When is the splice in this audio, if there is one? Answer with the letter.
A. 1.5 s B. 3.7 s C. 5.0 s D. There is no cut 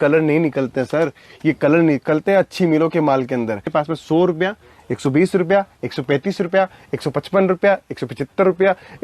B